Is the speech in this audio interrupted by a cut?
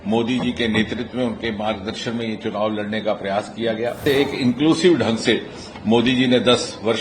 yes; 1 cut; at 4.0 s

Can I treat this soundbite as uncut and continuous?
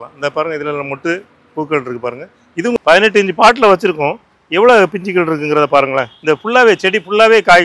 no; 1 cut; at 2.8 s

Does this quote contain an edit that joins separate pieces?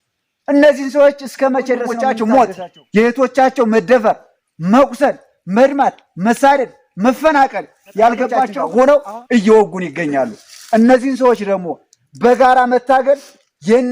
yes; 2 cuts; at 1.9 s, 8.6 s

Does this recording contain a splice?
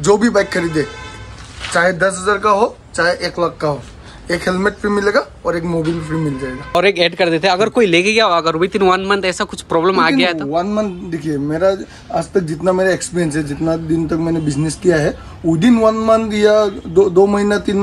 yes; 1 cut; at 6.8 s

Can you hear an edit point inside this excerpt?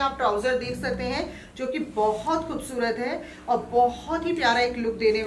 no; 0 cuts

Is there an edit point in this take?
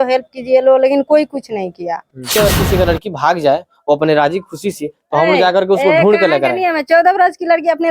yes; 1 cut; at 2.4 s

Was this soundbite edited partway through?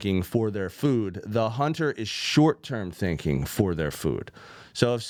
no; 0 cuts

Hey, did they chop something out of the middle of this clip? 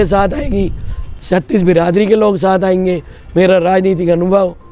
no; 0 cuts

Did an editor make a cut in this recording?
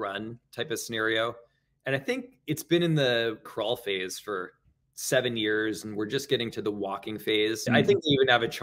yes; 1 cut; at 7.7 s

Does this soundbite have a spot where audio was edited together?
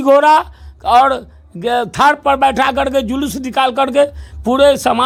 no; 0 cuts

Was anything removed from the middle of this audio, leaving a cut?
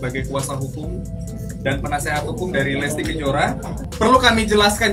yes; 1 cut; at 3.7 s

